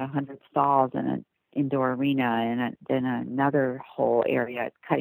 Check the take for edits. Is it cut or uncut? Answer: uncut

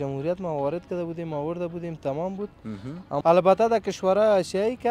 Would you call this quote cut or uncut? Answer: cut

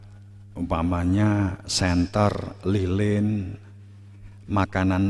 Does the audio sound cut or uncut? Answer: uncut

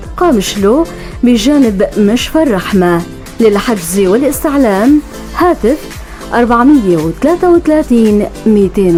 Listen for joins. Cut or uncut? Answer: uncut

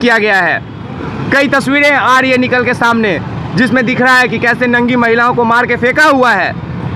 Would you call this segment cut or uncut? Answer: uncut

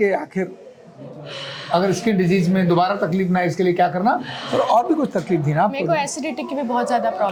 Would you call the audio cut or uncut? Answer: uncut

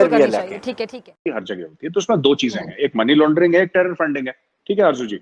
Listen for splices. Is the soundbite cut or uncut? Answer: uncut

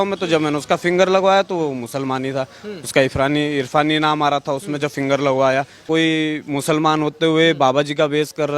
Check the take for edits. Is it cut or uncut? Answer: cut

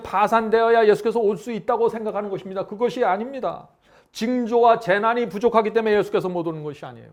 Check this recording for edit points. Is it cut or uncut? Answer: uncut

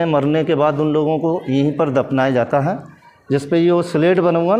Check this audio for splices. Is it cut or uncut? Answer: uncut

